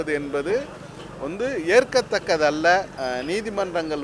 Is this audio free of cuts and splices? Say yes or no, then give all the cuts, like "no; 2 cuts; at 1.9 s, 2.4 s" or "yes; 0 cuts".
no; 1 cut; at 2.9 s